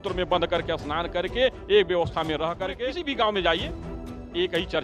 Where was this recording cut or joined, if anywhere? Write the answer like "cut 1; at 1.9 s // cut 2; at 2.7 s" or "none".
cut 1; at 2.6 s